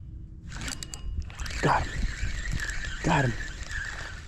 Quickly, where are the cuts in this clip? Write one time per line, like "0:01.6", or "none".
none